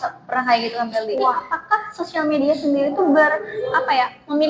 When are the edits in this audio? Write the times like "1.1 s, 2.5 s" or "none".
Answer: 1.5 s